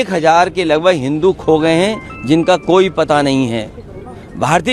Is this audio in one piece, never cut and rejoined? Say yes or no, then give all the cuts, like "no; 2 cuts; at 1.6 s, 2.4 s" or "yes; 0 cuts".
yes; 0 cuts